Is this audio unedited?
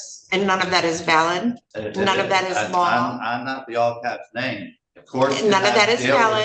no; 1 cut; at 1.7 s

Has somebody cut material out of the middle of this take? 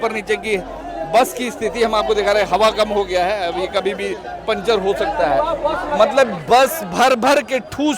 no; 0 cuts

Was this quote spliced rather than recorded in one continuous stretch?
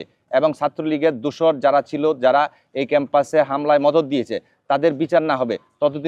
no; 0 cuts

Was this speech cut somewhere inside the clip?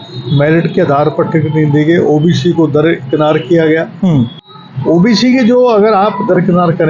no; 0 cuts

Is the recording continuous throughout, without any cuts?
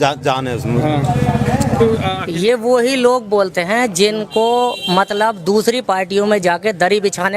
no; 1 cut; at 2.3 s

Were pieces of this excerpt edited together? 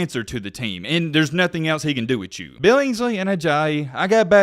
yes; 1 cut; at 2.5 s

